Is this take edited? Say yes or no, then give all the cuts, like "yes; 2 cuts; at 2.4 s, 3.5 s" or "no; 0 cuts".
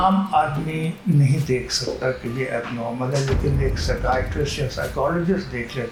no; 0 cuts